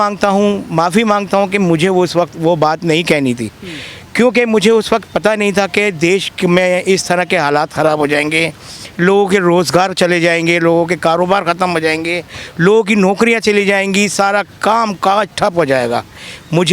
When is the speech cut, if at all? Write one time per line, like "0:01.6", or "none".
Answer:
none